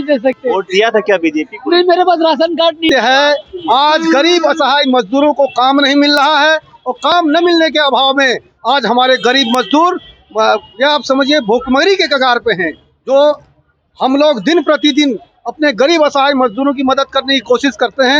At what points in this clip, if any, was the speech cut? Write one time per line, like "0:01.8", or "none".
0:02.9